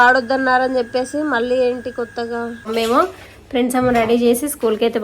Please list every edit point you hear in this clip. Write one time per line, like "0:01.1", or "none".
0:02.7

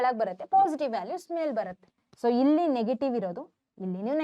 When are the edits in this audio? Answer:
0:02.0

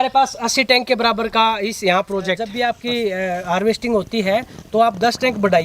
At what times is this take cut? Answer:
0:02.5

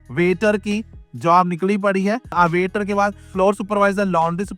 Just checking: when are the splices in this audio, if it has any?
0:02.3

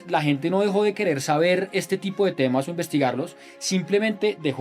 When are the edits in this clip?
none

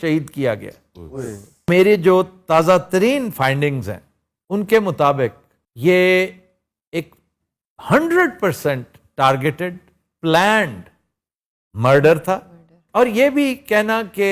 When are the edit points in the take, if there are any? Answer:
0:01.7

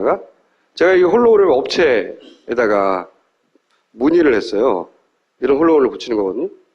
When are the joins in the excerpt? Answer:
0:01.5

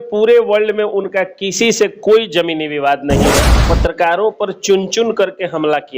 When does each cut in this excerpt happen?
0:03.7

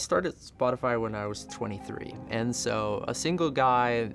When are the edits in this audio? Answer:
0:02.3

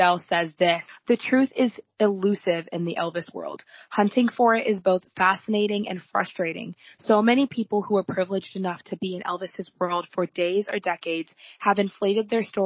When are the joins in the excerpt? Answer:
0:00.9

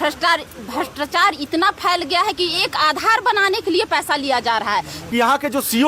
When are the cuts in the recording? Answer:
0:05.0

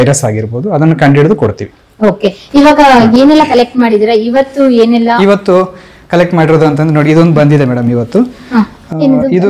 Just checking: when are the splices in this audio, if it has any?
none

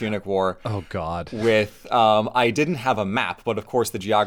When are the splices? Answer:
none

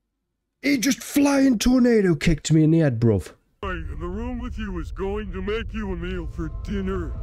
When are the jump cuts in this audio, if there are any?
0:03.7

